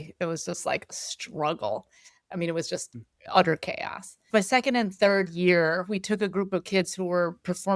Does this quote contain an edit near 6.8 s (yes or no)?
no